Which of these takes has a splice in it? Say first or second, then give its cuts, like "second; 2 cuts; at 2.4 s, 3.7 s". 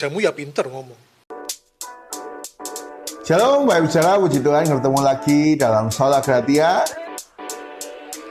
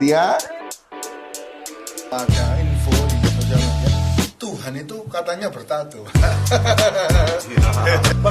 first; 1 cut; at 1.1 s